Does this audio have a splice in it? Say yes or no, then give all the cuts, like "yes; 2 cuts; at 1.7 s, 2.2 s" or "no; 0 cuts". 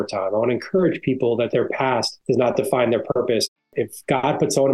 yes; 2 cuts; at 1.7 s, 3.6 s